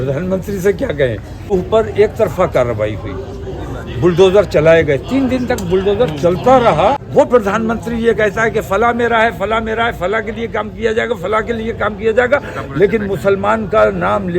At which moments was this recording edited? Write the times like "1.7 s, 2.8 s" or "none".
1.5 s, 7.0 s

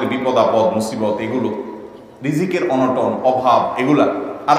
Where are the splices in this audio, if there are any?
none

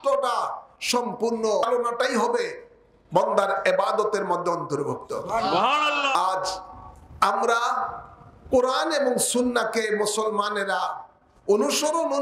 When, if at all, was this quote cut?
1.6 s, 6.2 s

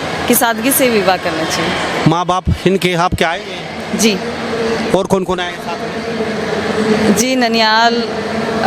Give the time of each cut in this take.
none

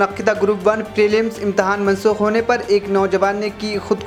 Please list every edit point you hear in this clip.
none

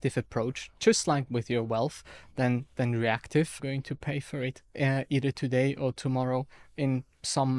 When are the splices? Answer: 3.6 s

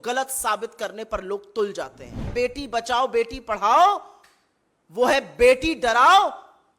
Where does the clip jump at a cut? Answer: 2.3 s

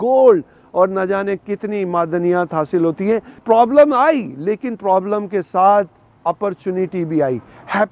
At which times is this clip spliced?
3.4 s

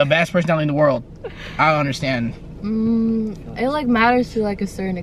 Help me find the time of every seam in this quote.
none

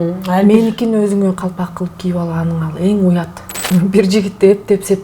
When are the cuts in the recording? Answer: 3.6 s

